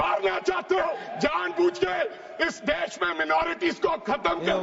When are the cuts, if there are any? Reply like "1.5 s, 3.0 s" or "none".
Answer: none